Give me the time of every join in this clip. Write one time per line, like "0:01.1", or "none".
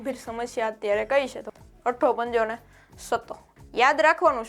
0:01.5
0:03.4